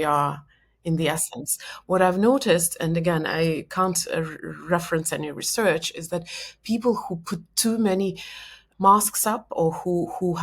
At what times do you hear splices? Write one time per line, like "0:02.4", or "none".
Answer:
0:08.6